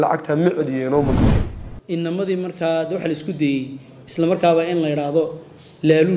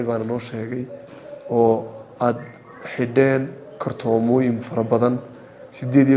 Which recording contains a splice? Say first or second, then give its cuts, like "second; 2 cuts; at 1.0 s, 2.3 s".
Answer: first; 1 cut; at 1.4 s